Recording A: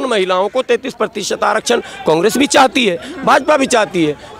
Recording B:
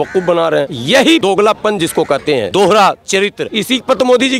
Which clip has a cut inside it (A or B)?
B